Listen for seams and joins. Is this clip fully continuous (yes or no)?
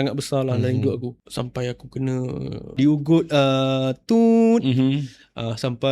no